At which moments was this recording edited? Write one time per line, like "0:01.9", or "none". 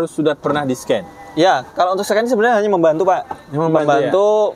none